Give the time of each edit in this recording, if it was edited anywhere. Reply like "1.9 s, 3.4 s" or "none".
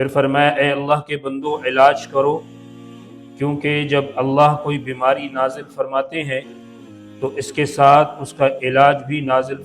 none